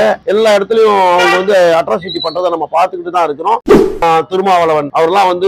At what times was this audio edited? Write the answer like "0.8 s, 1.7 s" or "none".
4.0 s